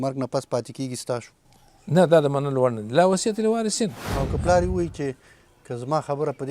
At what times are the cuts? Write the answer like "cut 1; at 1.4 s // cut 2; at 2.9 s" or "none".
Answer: cut 1; at 1.4 s // cut 2; at 4.1 s

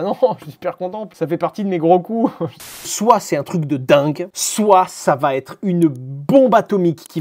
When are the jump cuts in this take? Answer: cut 1; at 1.1 s // cut 2; at 2.9 s

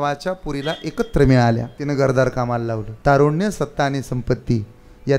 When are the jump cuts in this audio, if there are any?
cut 1; at 1.7 s // cut 2; at 2.9 s

